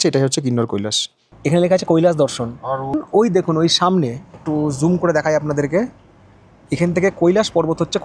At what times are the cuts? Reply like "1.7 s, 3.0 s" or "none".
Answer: 1.3 s, 3.0 s